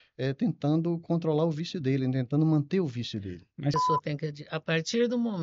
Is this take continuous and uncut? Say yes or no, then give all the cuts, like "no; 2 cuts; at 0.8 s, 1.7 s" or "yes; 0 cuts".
no; 1 cut; at 3.8 s